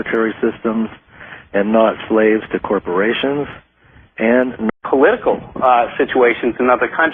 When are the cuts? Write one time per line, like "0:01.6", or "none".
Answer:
none